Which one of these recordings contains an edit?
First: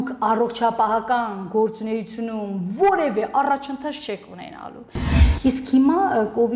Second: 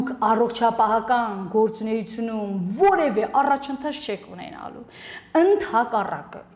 first; 1 cut; at 5.1 s

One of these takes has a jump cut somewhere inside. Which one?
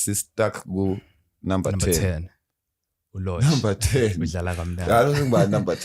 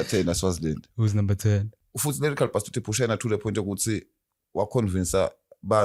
second; 1 cut; at 1.8 s

